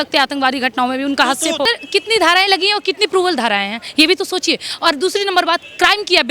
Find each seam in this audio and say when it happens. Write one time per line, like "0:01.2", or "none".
0:01.7